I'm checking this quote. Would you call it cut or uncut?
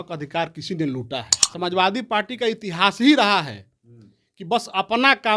cut